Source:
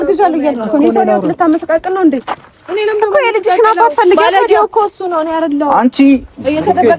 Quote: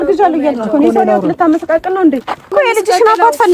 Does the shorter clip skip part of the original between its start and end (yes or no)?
yes